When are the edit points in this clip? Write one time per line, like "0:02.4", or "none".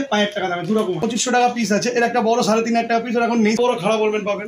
0:00.8
0:03.6